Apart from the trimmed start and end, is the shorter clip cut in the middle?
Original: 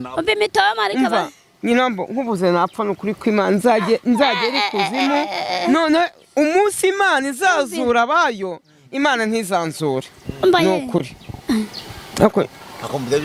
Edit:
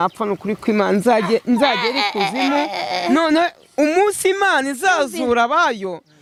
no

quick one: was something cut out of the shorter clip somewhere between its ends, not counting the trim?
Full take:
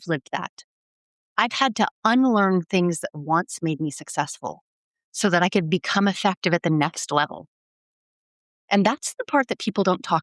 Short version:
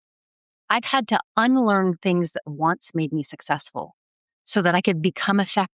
no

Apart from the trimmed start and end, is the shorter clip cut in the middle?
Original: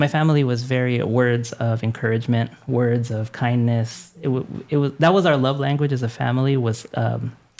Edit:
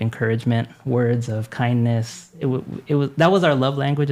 no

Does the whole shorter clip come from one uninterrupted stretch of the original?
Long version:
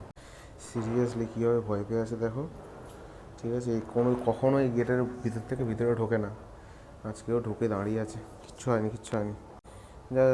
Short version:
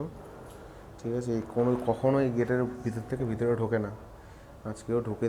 yes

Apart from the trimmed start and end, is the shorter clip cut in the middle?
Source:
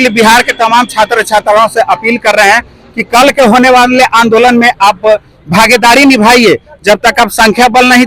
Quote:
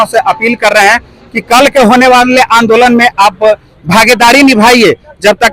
no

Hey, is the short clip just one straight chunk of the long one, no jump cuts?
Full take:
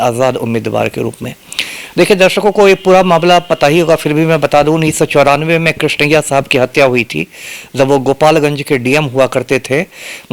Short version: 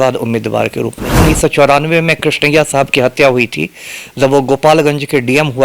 no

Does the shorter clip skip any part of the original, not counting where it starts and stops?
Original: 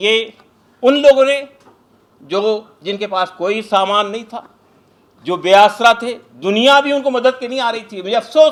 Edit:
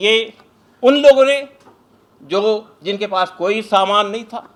no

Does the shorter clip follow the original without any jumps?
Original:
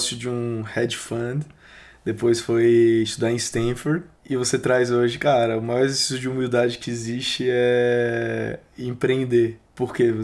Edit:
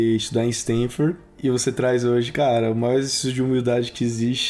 yes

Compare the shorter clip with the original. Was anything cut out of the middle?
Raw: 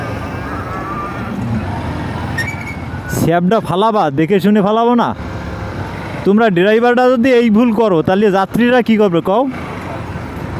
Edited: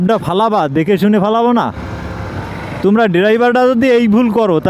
no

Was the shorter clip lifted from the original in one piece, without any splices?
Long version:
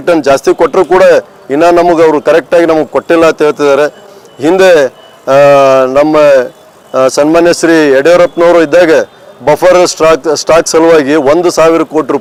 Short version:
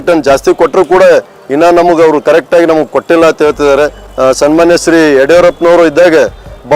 no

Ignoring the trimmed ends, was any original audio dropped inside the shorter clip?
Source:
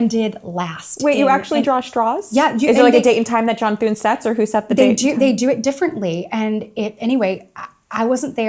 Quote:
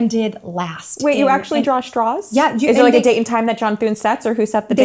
no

